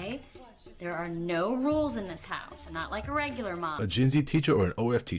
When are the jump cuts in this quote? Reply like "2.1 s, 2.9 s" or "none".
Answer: 3.8 s